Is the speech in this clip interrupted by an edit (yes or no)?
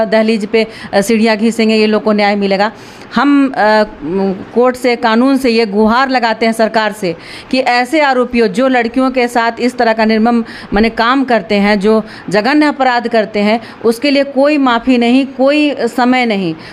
no